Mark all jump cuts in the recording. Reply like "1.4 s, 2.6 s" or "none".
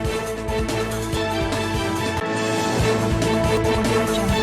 1.1 s